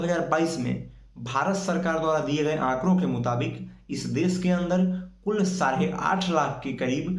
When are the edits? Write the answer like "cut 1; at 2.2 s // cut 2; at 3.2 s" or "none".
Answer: none